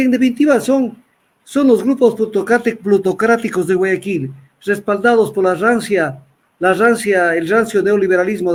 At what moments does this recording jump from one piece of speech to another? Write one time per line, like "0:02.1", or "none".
none